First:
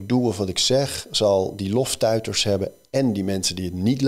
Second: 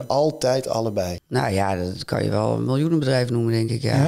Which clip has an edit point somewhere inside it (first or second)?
second